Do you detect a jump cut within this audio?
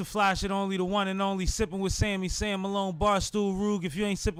no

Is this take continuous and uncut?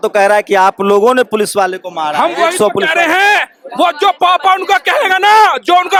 yes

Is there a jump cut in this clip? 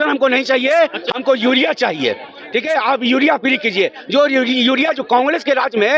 no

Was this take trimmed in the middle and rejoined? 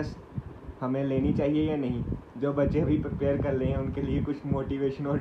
no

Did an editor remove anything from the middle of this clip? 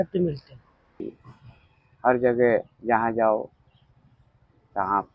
yes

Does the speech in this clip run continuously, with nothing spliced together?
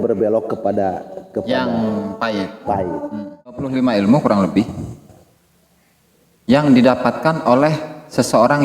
no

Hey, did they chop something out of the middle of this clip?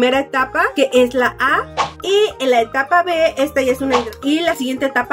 yes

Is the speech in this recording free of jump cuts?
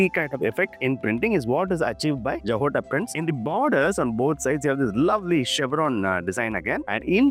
yes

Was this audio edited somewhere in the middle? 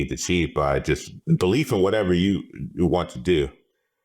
yes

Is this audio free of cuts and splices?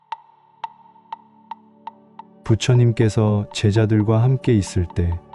no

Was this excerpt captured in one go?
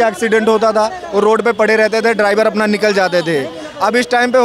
yes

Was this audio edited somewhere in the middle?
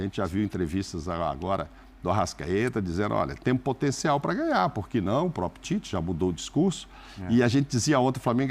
no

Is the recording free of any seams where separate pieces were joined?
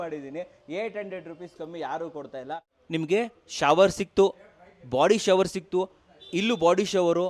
no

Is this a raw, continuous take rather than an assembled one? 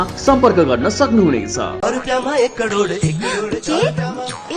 no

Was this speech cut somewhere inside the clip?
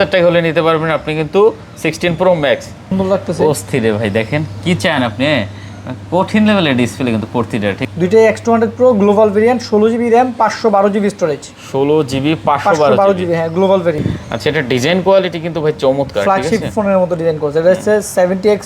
yes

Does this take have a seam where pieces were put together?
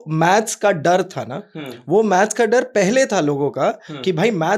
no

